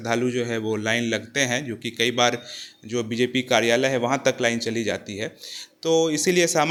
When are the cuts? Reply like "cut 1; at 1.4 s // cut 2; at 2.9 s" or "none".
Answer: none